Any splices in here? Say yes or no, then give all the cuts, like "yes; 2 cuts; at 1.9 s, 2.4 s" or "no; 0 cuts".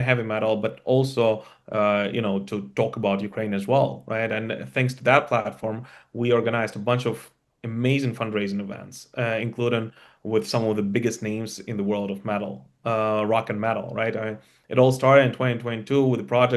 no; 0 cuts